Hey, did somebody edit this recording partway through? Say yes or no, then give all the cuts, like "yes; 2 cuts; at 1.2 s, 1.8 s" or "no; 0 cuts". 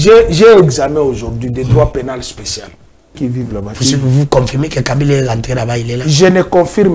yes; 1 cut; at 3.2 s